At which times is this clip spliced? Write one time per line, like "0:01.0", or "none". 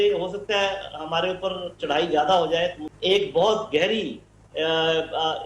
0:02.9